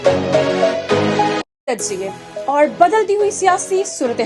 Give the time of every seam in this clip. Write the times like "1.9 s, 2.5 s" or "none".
1.4 s